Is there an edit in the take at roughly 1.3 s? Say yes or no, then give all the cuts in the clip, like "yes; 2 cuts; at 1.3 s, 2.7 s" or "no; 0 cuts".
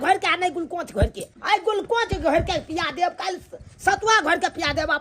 yes; 1 cut; at 1.3 s